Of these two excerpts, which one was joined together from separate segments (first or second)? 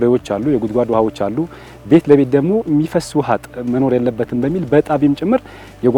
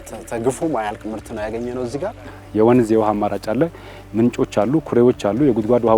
second